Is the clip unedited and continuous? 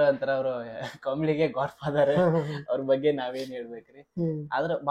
yes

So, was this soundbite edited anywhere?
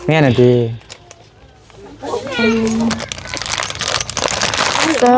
yes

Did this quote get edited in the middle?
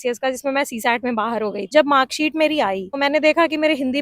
yes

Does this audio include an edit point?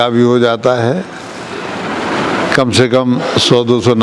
no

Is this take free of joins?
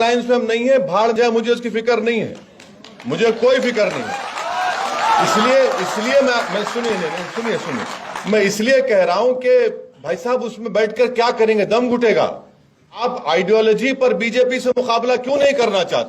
no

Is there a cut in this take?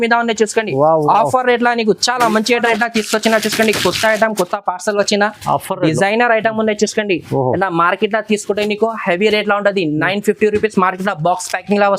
yes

